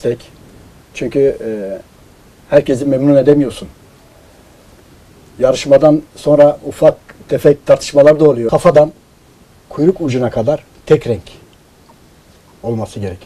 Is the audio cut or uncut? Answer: cut